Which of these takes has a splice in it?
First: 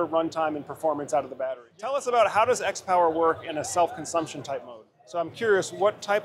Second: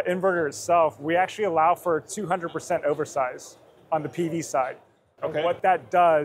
first; 2 cuts; at 1.5 s, 5.3 s

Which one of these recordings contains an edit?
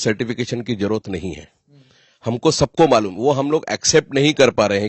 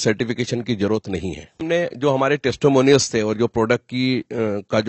second; 1 cut; at 1.6 s

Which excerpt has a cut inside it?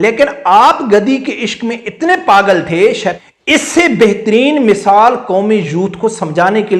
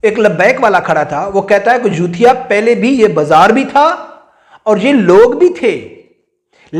first; 1 cut; at 3.1 s

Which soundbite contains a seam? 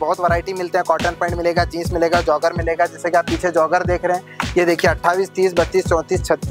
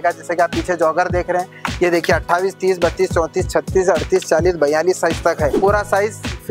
second; 1 cut; at 5.6 s

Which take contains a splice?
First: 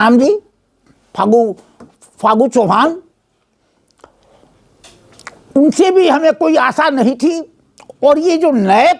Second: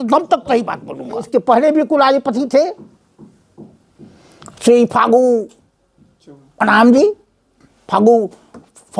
second; 1 cut; at 1.3 s

